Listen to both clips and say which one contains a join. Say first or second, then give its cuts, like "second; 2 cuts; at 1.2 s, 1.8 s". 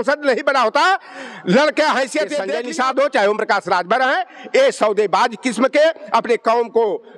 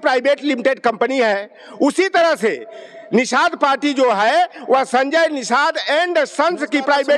first; 1 cut; at 2.5 s